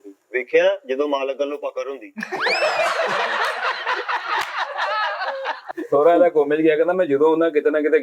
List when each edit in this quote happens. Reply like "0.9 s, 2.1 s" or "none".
5.7 s